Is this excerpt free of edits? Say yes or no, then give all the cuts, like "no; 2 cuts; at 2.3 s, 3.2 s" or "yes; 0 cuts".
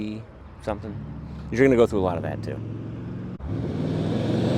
no; 1 cut; at 3.3 s